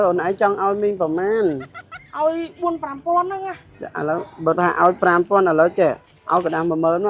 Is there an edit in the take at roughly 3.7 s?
no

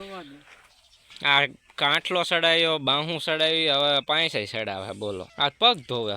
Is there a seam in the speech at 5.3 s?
yes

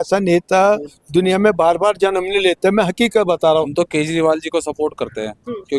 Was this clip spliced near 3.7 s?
yes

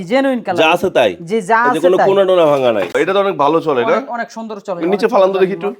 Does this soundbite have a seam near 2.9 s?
yes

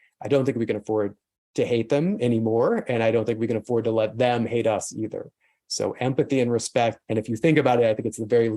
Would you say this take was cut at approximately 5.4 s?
no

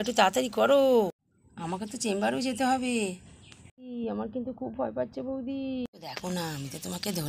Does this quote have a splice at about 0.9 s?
no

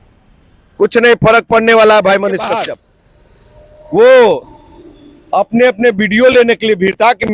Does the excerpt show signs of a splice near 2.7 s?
yes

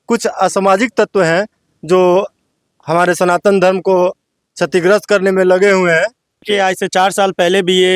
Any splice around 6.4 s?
yes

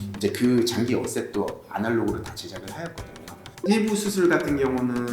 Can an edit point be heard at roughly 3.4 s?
yes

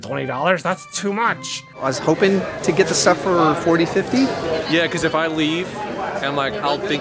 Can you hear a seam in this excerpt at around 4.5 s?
yes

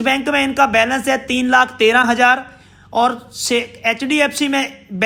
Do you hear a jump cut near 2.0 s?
no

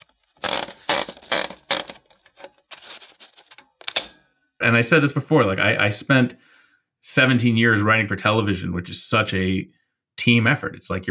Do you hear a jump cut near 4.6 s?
yes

